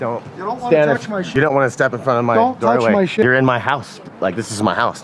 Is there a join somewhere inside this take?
yes; 2 cuts; at 1.2 s, 3.2 s

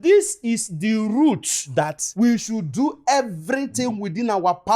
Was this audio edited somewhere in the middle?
no; 0 cuts

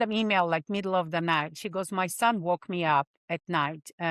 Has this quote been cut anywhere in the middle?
no; 0 cuts

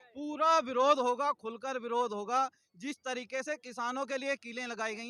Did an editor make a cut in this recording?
no; 0 cuts

